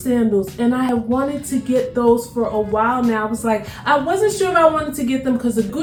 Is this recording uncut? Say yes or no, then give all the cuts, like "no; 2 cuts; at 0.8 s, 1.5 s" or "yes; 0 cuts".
yes; 0 cuts